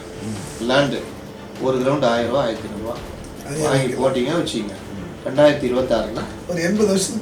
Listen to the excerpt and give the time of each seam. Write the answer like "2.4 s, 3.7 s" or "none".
none